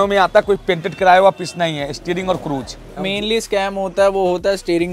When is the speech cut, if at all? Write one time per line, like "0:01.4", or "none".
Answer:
0:03.0